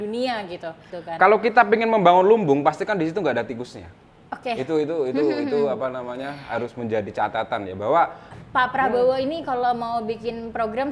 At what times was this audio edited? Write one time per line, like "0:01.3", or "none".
0:00.9
0:08.2